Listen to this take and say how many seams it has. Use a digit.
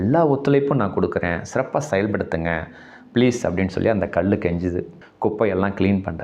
1